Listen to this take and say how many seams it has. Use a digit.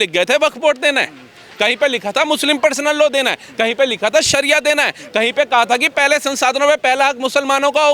0